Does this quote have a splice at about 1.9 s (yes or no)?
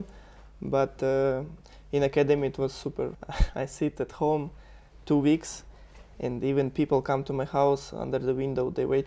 no